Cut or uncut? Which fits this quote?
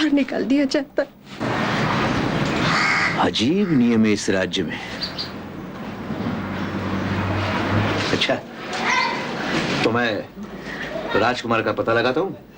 uncut